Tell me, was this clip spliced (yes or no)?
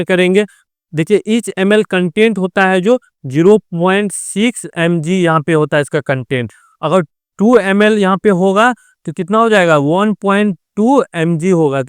no